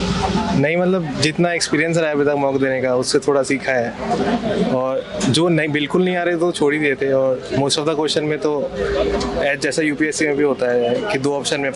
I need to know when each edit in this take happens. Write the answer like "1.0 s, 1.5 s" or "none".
none